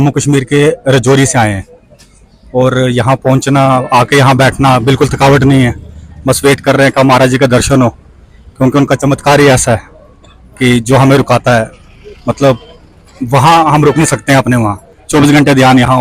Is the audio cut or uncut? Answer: uncut